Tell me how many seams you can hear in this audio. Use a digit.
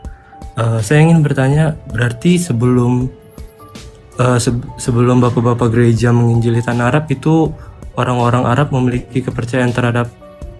0